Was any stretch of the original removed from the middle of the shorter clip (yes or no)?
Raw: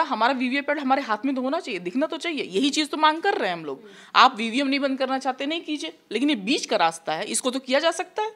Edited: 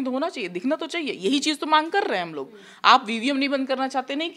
no